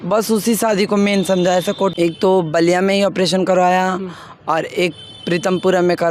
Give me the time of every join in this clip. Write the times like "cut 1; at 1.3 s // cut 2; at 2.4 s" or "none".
cut 1; at 1.9 s